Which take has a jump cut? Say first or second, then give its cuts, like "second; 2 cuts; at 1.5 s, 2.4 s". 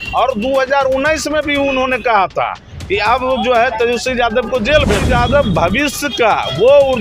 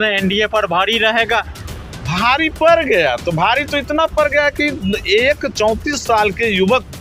first; 1 cut; at 5.0 s